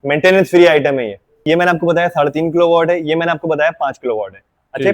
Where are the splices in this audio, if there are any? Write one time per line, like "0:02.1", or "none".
0:01.4